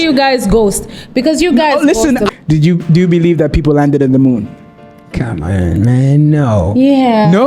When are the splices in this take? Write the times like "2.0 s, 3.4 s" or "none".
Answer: 2.3 s